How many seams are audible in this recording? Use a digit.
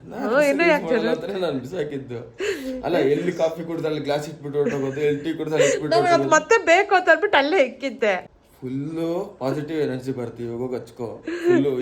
1